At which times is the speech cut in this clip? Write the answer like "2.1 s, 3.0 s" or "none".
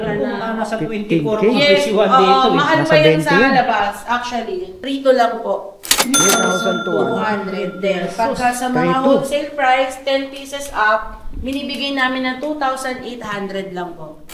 4.7 s